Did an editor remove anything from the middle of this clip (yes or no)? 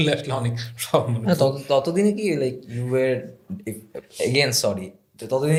no